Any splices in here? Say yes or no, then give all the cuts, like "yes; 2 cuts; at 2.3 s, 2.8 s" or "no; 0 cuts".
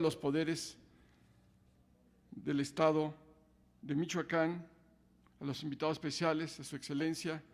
yes; 1 cut; at 5.1 s